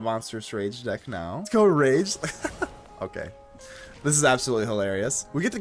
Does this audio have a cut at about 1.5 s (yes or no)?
yes